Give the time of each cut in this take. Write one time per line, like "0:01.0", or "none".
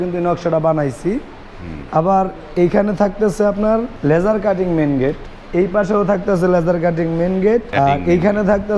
0:03.9
0:05.3
0:07.7

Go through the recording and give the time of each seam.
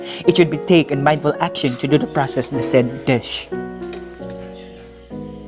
0:03.3

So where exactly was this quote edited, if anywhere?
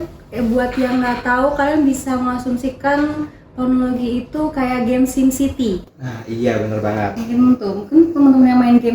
0:05.8

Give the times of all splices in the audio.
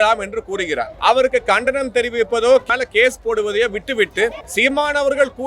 0:00.9
0:02.6
0:04.4

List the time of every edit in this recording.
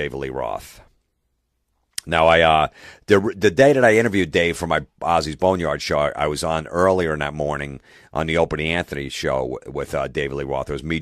0:08.3

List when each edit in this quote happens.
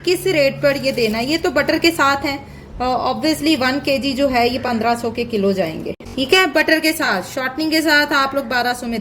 0:05.8

